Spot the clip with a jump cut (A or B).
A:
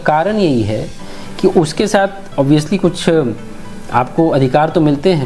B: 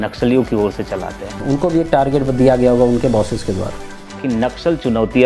B